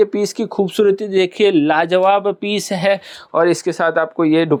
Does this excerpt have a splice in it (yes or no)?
no